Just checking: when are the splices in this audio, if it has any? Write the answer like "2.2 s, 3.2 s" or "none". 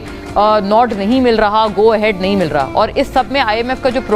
none